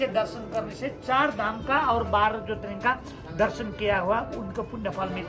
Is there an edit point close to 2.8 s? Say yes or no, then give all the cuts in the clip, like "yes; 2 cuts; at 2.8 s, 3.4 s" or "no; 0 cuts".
no; 0 cuts